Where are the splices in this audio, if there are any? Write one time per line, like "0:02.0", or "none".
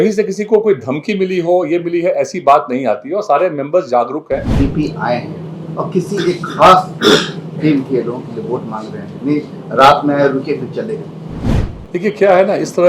0:04.5